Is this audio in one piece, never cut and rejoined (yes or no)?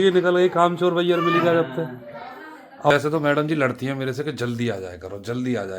no